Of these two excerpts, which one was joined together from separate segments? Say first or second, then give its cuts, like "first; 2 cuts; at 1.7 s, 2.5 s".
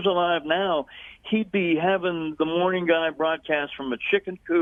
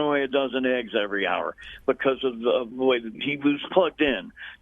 second; 1 cut; at 2.9 s